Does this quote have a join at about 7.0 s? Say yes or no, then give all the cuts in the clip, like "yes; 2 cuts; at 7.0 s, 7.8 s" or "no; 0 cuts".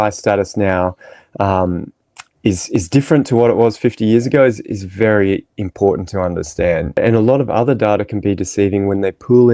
yes; 1 cut; at 7.0 s